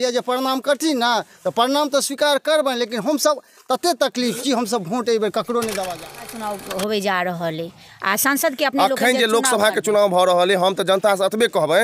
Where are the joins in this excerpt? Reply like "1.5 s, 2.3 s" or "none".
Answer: 6.4 s